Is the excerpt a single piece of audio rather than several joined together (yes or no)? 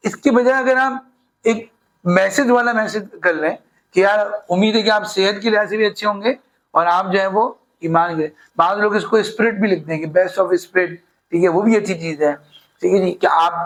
yes